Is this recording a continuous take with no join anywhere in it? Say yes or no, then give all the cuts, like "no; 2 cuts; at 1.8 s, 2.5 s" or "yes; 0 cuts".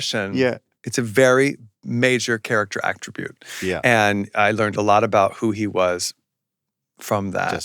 no; 1 cut; at 4.3 s